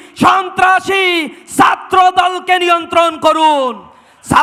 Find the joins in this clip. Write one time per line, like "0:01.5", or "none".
none